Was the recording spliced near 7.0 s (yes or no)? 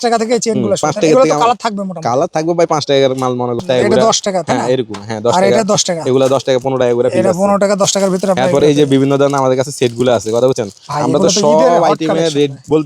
no